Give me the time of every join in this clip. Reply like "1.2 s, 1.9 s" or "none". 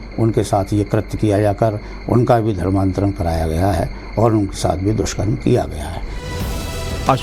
none